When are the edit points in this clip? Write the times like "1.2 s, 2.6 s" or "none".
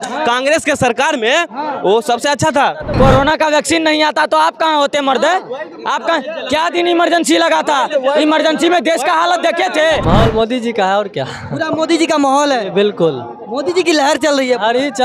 2.9 s, 10.0 s